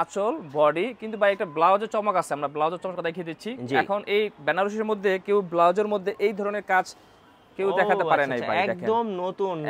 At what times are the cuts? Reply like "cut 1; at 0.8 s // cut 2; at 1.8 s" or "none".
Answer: none